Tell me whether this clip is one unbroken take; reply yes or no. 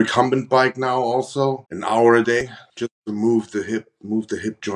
no